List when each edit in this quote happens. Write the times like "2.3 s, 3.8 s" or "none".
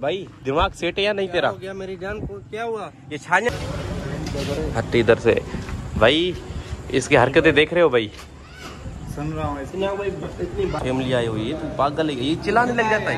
3.5 s, 5.9 s, 10.8 s